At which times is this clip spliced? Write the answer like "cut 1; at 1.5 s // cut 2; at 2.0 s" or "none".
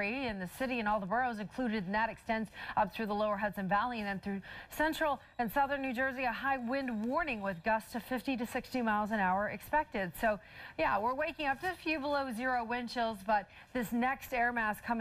cut 1; at 4.0 s

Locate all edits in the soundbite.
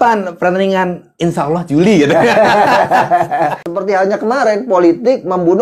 cut 1; at 3.6 s

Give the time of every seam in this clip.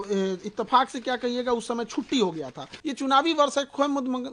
cut 1; at 2.8 s

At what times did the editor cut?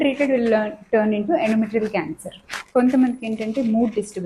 cut 1; at 2.5 s

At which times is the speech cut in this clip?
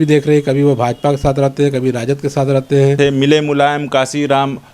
cut 1; at 3.0 s

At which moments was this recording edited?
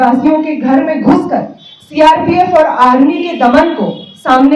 none

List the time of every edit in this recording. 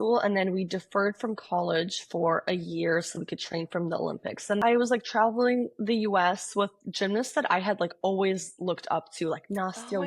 cut 1; at 4.6 s

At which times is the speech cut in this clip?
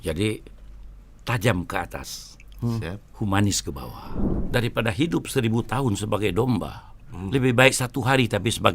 cut 1; at 4.2 s

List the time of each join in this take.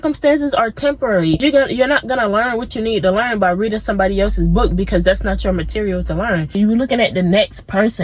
cut 1; at 1.4 s // cut 2; at 6.6 s

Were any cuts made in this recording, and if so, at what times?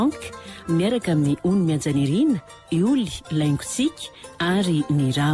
none

